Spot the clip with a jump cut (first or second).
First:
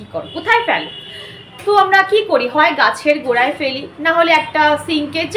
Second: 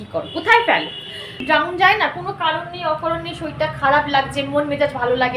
second